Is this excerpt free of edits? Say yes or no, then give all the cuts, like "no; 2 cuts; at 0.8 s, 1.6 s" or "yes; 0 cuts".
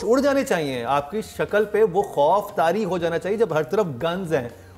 yes; 0 cuts